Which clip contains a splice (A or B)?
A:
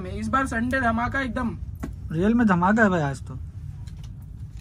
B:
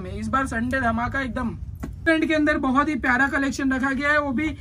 B